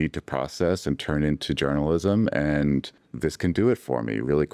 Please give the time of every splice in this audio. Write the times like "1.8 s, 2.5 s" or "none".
none